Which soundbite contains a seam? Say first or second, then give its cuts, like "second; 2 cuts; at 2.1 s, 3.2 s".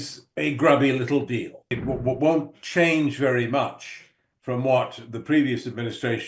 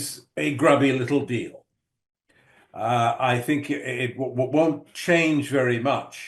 first; 1 cut; at 1.7 s